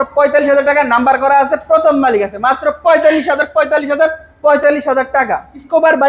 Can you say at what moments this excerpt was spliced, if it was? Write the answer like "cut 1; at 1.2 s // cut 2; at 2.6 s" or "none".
none